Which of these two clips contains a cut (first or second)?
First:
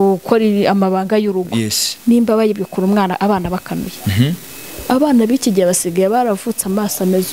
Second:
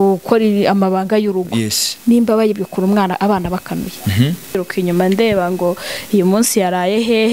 second